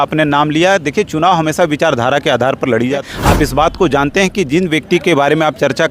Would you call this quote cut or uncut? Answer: cut